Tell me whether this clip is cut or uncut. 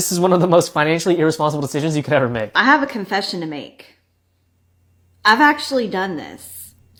uncut